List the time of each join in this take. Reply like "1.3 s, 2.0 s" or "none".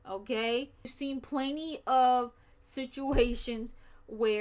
0.9 s

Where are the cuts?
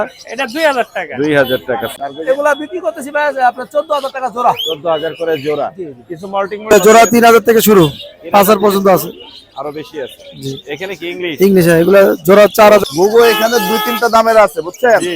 1.9 s, 6.7 s, 12.8 s

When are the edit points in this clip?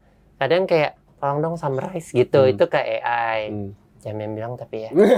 none

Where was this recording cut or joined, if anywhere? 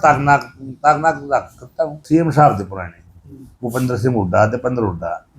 2.0 s

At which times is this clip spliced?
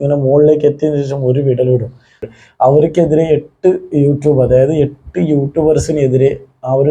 2.2 s

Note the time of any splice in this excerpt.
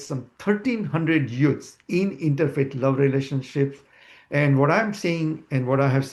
none

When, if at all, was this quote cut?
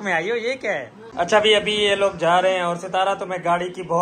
1.0 s

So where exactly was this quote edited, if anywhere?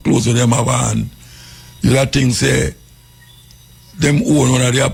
none

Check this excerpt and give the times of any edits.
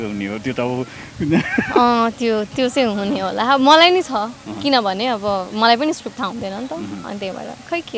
none

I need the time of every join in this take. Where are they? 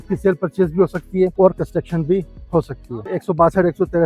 1.3 s, 3.1 s

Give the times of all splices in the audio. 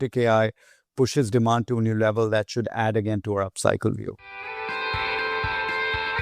4.2 s

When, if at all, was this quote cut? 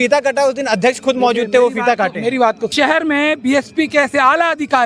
2.7 s

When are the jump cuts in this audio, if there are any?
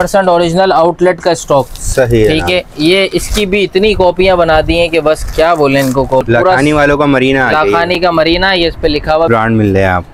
6.3 s, 9.3 s

